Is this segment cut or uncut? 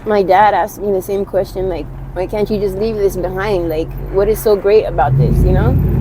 cut